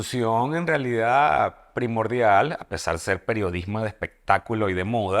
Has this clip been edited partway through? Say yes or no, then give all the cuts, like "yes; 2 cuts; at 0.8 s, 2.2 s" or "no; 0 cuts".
no; 0 cuts